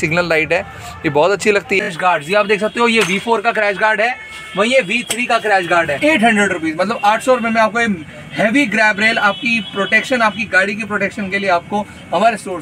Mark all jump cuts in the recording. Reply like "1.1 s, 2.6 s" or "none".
1.9 s, 5.9 s